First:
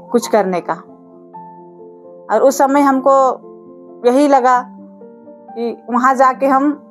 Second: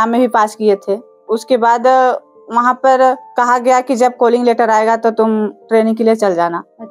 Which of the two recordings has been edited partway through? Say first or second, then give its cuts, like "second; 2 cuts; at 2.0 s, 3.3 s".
second; 2 cuts; at 1.1 s, 3.2 s